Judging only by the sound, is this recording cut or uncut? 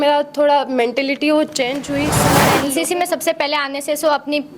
cut